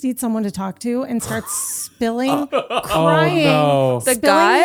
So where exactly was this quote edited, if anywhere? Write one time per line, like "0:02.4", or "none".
none

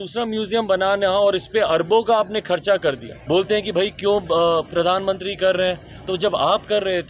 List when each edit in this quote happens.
0:03.1

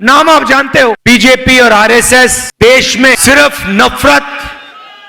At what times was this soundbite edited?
0:01.0
0:02.4
0:03.2

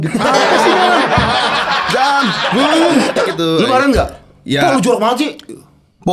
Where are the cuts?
0:03.2

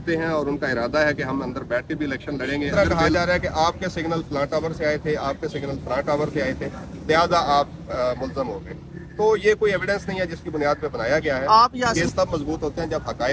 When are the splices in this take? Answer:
0:02.7
0:12.0

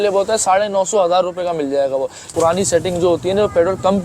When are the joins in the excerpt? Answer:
0:02.2

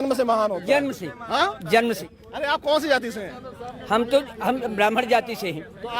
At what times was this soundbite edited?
0:02.1

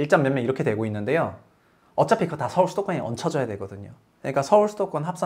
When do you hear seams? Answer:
none

